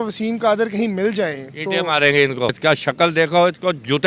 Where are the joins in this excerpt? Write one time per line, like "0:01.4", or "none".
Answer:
0:02.6

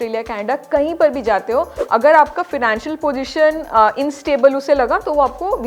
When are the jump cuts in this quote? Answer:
0:01.8

